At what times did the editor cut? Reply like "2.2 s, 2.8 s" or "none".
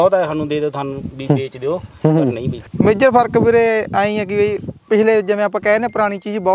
2.6 s

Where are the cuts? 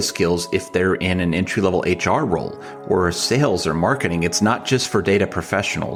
none

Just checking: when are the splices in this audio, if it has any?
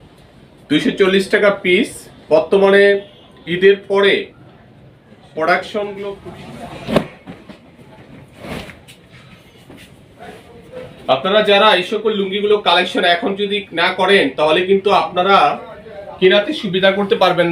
6.1 s

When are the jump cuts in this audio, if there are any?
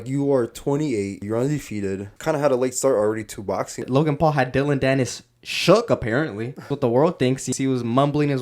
1.2 s, 2.1 s, 3.8 s, 6.7 s, 7.5 s

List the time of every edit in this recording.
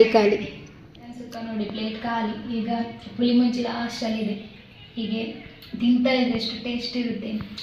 1.2 s

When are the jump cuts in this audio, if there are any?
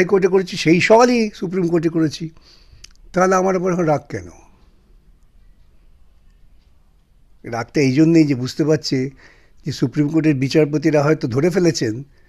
none

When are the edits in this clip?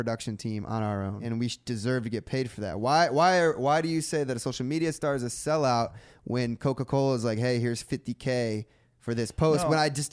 1.2 s

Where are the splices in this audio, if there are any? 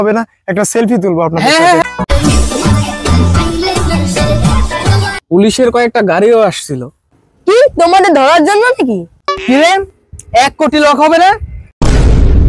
1.8 s, 5.1 s, 9.3 s

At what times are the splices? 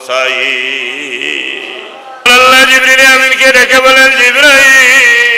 2.3 s

